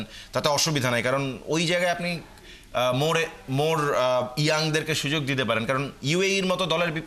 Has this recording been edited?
no; 0 cuts

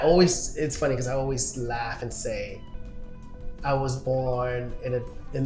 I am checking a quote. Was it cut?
no; 0 cuts

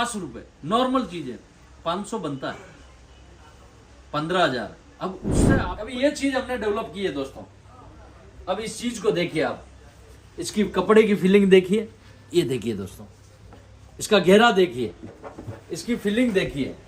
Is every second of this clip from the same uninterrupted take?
no; 1 cut; at 5.6 s

